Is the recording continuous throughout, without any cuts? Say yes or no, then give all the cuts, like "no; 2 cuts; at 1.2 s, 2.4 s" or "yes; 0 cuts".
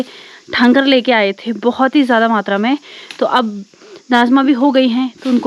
yes; 0 cuts